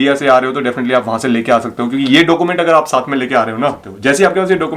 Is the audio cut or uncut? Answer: cut